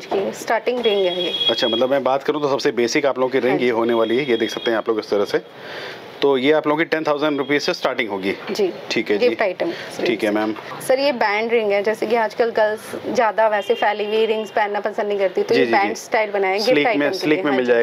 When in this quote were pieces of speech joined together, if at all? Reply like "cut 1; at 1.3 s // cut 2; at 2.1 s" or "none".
none

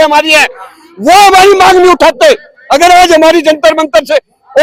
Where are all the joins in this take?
none

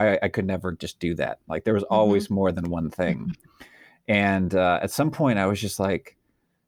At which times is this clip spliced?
none

